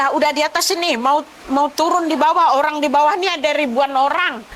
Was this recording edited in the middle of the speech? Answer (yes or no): no